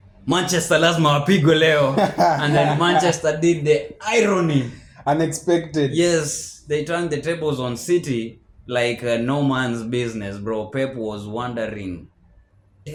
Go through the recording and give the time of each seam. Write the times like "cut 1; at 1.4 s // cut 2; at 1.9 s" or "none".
none